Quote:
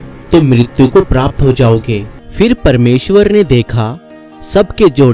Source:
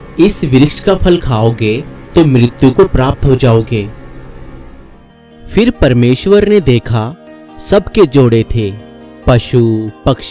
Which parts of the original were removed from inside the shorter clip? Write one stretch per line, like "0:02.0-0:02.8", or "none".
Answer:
0:04.0-0:05.3